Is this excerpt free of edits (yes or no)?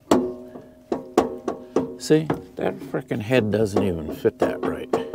yes